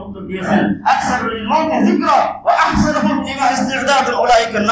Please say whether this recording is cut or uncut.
uncut